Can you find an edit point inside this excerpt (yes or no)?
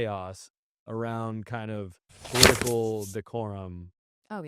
no